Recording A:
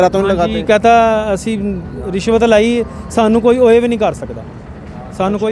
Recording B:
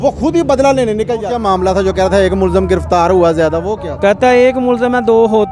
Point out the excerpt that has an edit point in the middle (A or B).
B